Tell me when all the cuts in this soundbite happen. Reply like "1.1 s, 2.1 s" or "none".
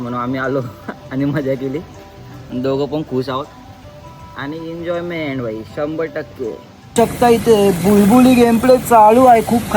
6.8 s